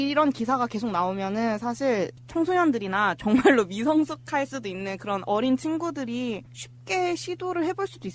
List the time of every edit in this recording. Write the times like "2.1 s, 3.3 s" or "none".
6.0 s